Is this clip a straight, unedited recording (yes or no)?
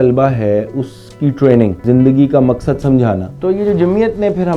no